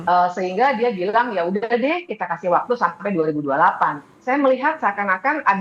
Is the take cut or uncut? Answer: cut